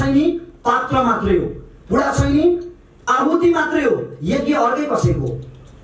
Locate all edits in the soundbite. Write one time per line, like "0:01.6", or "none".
none